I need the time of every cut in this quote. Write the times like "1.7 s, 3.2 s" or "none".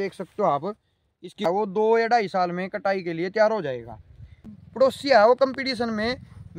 1.5 s, 4.6 s

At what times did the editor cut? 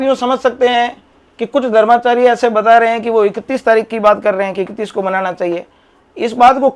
none

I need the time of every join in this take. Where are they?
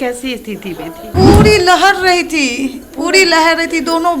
1.0 s

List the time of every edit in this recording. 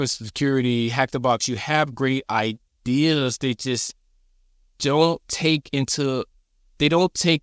none

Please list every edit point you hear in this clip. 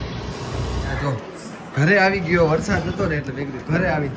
1.0 s

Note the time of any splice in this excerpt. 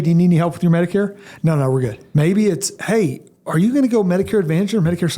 2.0 s

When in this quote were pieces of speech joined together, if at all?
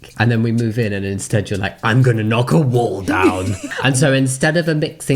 3.6 s

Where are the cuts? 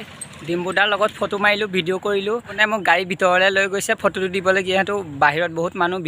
2.6 s

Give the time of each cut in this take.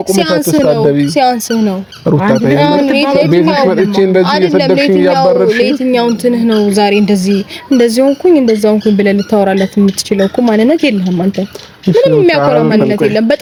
none

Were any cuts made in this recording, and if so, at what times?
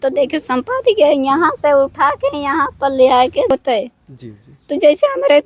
3.5 s

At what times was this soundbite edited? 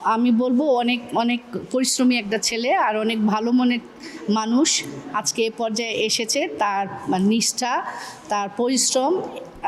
none

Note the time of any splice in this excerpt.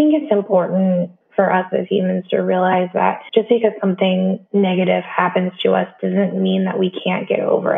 1.2 s, 3.2 s, 4.4 s

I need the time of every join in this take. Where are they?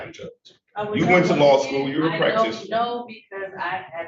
none

